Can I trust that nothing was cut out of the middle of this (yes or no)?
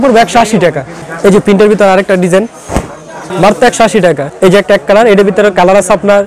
no